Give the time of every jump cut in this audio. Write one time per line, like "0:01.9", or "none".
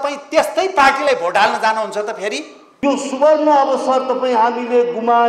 0:02.7